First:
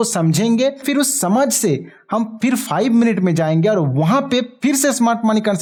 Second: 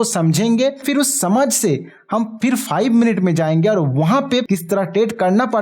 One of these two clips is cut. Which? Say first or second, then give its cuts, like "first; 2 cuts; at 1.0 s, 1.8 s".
second; 1 cut; at 4.5 s